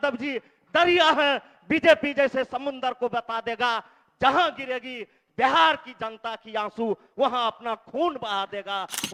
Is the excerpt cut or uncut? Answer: uncut